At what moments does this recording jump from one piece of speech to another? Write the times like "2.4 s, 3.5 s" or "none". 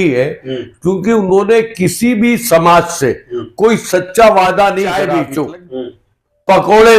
5.0 s